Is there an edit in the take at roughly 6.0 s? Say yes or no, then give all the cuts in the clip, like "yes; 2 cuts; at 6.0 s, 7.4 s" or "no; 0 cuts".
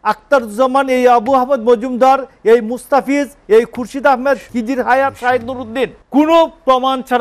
yes; 1 cut; at 6.0 s